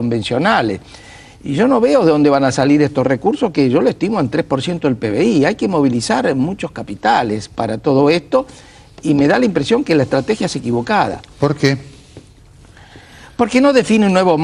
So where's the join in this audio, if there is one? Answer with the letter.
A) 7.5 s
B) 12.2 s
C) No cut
C